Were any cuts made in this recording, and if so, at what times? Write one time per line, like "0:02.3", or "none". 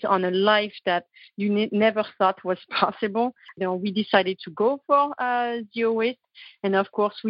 0:03.6
0:05.7